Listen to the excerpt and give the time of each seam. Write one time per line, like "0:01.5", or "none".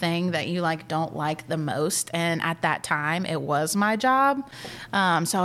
none